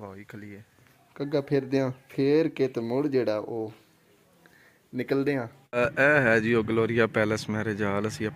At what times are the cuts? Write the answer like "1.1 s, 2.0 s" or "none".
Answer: 1.0 s, 2.0 s, 5.6 s